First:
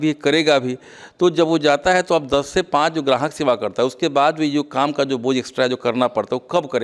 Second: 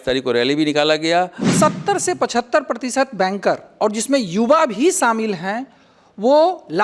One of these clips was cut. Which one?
second; 1 cut; at 1.4 s

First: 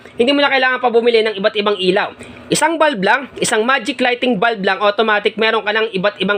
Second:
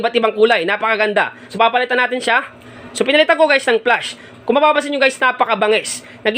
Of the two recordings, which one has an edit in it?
second; 2 cuts; at 1.4 s, 2.8 s

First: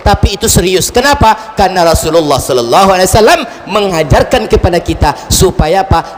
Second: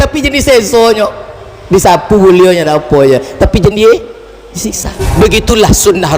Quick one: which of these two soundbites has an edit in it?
second; 1 cut; at 5.1 s

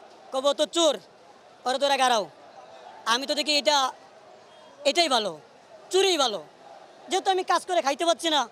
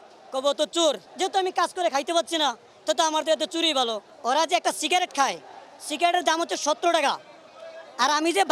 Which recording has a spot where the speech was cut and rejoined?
second; 2 cuts; at 1.1 s, 4.1 s

